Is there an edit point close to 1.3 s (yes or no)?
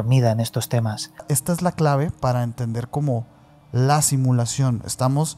yes